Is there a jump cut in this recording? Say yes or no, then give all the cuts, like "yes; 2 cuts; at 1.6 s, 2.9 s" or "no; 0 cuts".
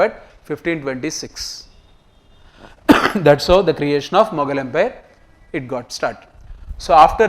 no; 0 cuts